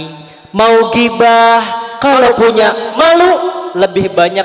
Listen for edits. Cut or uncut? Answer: uncut